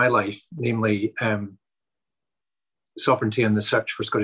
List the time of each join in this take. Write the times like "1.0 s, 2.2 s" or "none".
none